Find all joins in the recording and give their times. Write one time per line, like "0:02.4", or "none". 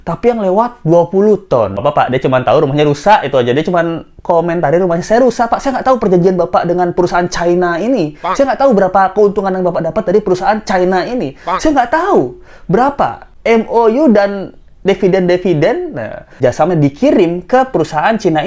0:01.8
0:16.4

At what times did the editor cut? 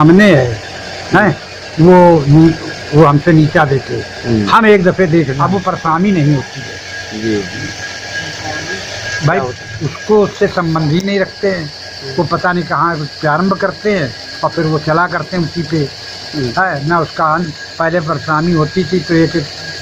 0:05.3

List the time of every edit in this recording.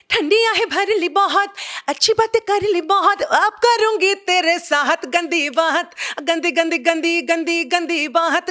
none

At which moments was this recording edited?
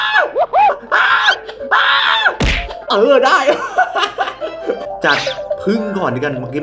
0:04.8

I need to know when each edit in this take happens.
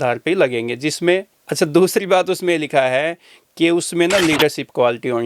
0:01.4

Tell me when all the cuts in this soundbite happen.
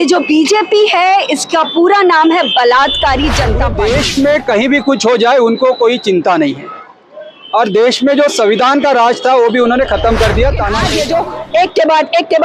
0:03.6
0:10.8

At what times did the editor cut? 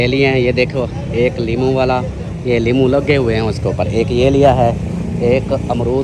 none

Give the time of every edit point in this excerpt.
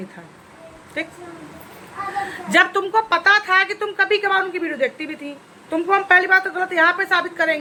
none

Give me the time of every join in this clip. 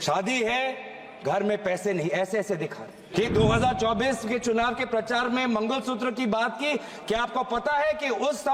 0:03.1

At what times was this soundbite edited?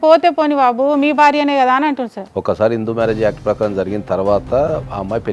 0:02.2

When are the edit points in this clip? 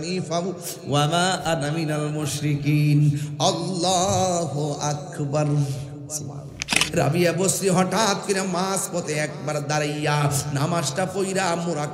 0:06.8

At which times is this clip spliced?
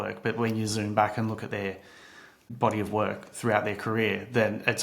0:02.5

